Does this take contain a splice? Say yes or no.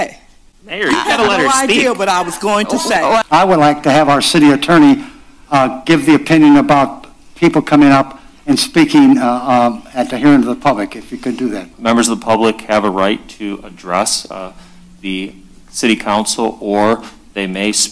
yes